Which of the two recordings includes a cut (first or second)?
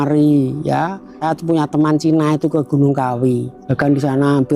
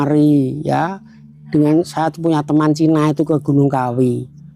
first